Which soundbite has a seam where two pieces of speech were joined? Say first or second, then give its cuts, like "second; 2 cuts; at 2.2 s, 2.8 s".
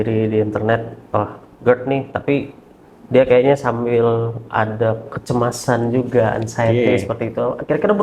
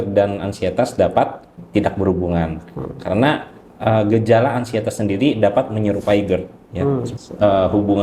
second; 2 cuts; at 1.5 s, 7.1 s